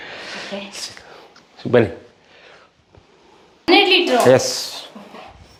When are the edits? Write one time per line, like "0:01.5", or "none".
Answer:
none